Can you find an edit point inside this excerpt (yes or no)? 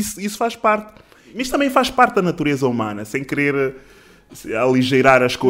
yes